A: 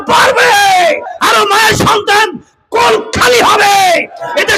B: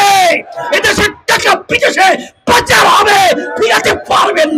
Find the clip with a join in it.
A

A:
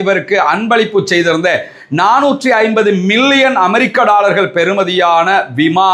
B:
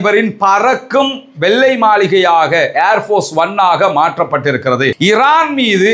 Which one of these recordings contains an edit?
B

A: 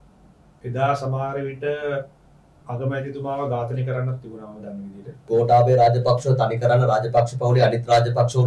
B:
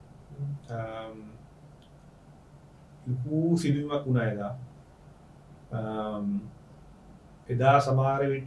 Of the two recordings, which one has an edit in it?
A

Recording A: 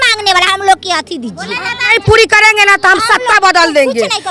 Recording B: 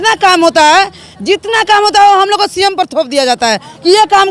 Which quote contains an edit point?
A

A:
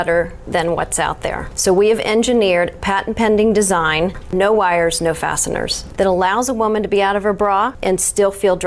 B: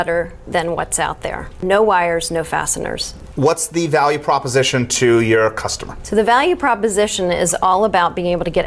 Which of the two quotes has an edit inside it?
A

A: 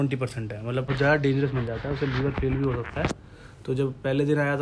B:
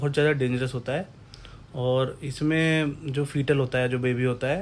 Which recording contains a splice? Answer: A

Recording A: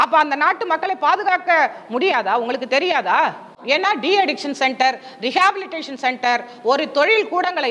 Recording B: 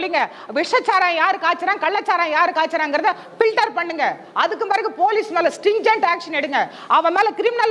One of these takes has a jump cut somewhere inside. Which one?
A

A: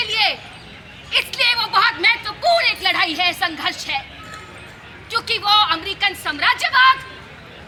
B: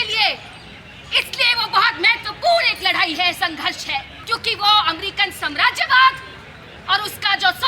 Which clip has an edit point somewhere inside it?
B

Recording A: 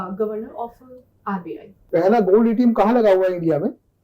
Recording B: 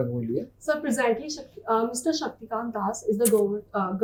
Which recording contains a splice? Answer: A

